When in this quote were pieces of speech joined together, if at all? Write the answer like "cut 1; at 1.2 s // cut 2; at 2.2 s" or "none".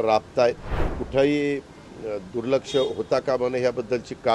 cut 1; at 1.0 s